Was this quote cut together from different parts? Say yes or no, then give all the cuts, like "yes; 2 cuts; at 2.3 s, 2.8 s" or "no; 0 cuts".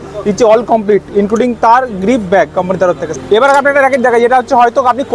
yes; 1 cut; at 3.1 s